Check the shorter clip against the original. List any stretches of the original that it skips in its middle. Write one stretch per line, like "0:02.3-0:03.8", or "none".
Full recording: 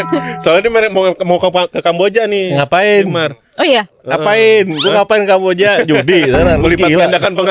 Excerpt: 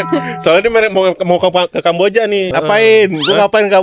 0:02.5-0:04.0